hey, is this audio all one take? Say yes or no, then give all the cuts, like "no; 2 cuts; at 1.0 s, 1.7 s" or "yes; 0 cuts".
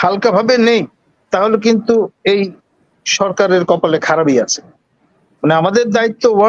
yes; 0 cuts